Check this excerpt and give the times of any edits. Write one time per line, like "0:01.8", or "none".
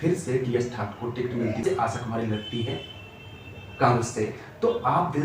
0:01.6